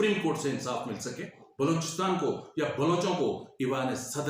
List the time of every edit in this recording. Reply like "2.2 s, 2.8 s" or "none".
1.4 s